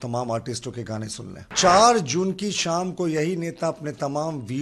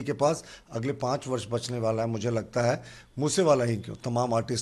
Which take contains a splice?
first; 1 cut; at 1.5 s

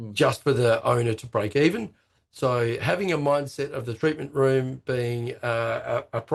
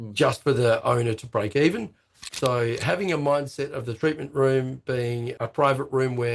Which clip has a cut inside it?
second; 1 cut; at 5.3 s

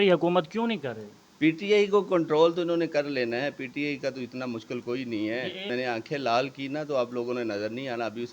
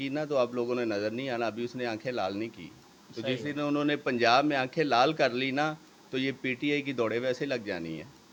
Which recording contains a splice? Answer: first; 1 cut; at 5.7 s

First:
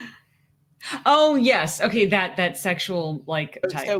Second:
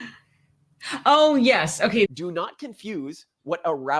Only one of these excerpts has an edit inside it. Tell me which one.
second; 1 cut; at 2.1 s

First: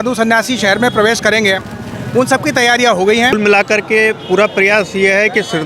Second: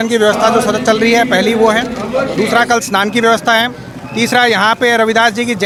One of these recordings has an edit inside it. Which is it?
first; 1 cut; at 3.3 s

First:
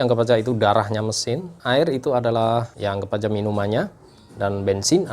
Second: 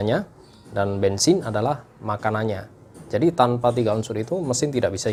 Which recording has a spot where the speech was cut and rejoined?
first; 2 cuts; at 1.5 s, 2.7 s

